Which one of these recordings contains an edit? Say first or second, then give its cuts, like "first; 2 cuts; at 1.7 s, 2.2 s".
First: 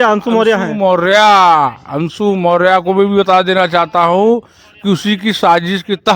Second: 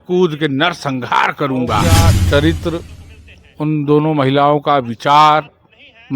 second; 1 cut; at 2.1 s